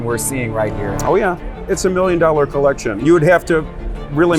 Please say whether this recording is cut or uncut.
cut